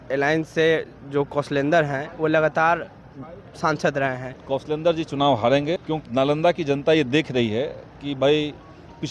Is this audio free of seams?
no; 2 cuts; at 4.3 s, 5.8 s

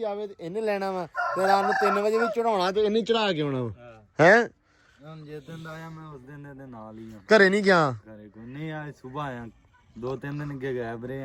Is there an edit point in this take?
no; 0 cuts

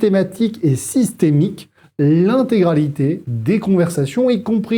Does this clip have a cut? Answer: no; 0 cuts

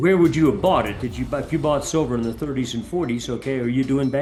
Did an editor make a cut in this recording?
no; 0 cuts

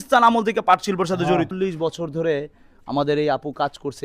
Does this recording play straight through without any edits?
no; 1 cut; at 1.5 s

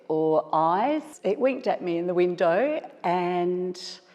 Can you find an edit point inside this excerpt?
yes; 1 cut; at 1.1 s

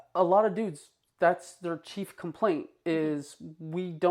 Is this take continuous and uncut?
yes; 0 cuts

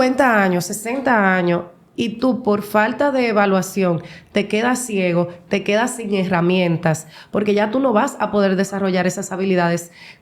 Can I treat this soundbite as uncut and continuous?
yes; 0 cuts

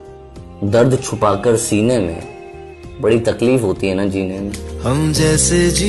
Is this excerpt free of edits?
yes; 0 cuts

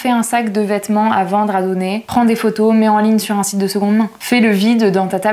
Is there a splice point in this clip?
no; 0 cuts

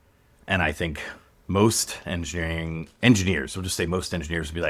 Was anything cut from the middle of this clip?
no; 0 cuts

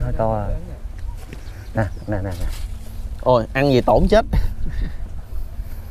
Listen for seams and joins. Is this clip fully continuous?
yes; 0 cuts

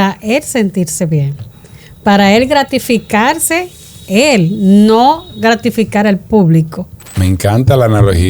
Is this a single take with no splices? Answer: no; 1 cut; at 7.0 s

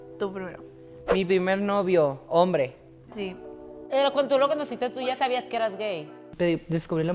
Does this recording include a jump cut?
yes; 2 cuts; at 3.7 s, 6.2 s

